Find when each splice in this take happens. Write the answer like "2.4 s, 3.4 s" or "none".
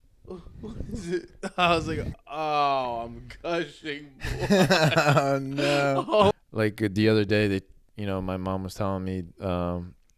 6.3 s